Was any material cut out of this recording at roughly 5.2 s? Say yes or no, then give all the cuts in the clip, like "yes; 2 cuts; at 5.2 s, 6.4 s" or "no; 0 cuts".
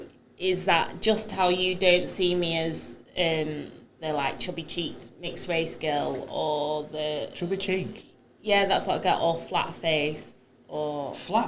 no; 0 cuts